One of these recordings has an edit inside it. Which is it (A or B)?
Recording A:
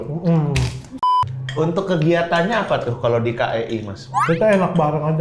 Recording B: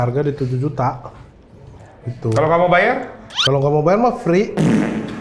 A